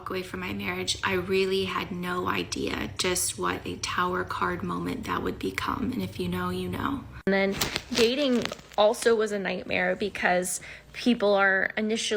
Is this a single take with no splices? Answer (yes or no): no